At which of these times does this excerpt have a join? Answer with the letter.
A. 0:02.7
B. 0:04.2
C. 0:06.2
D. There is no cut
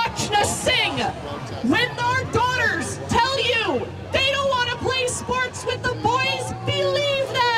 D